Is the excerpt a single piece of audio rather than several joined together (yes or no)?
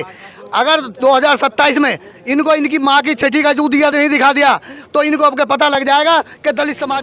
yes